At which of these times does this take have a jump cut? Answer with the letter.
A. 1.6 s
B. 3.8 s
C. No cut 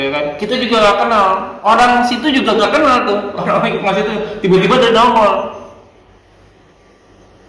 C